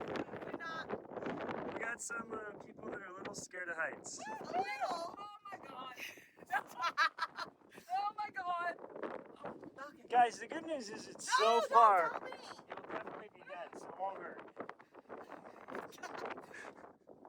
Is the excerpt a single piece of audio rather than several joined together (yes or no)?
yes